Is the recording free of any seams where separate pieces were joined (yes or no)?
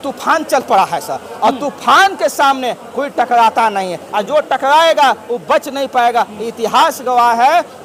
yes